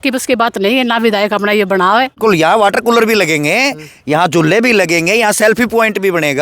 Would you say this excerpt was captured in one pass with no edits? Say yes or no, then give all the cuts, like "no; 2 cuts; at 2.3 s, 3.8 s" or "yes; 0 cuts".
no; 1 cut; at 2.1 s